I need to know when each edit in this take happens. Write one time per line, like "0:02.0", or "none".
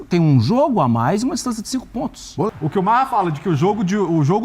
0:02.5

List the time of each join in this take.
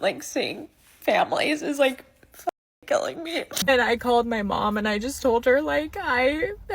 0:03.6

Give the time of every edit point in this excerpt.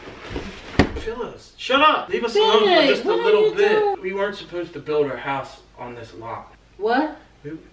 0:02.1
0:04.0
0:06.6

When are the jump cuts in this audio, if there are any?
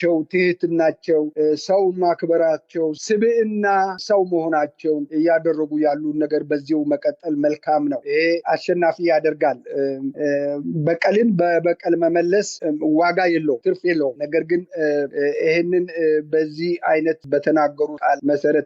0:04.0
0:08.4
0:12.5
0:17.2

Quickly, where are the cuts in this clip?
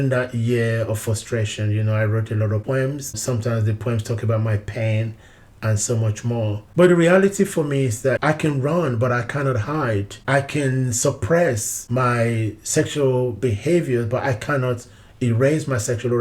0:02.8
0:06.6
0:08.2

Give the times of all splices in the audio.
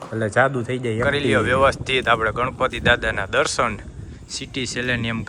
0:01.0

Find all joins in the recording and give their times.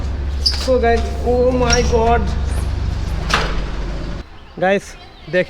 0:04.2

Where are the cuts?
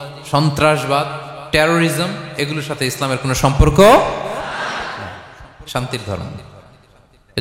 none

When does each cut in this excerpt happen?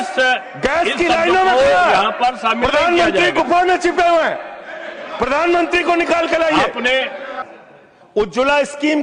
0:07.4

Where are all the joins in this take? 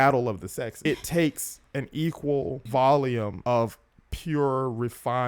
0:00.8
0:02.6
0:03.3

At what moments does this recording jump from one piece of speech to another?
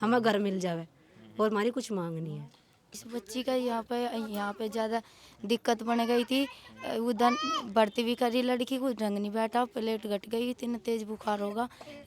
0:02.9

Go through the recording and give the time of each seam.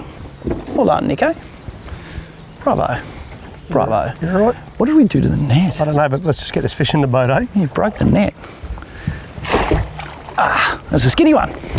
none

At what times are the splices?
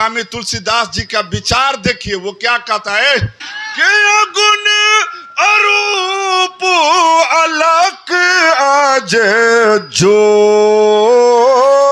0:03.4

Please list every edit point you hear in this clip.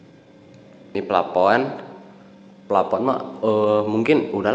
0:00.9

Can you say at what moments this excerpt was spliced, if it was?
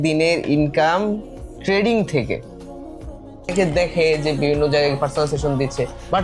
0:03.5

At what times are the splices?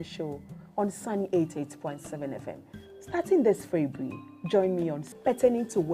0:05.0

